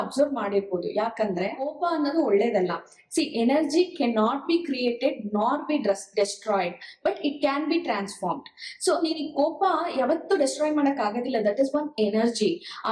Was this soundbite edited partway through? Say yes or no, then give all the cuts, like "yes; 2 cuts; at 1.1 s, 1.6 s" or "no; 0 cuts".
yes; 1 cut; at 1.7 s